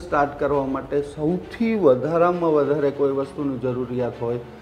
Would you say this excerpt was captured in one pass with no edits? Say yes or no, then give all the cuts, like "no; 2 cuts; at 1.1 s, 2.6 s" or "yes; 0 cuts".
yes; 0 cuts